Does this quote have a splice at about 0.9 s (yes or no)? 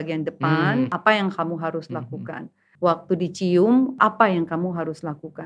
no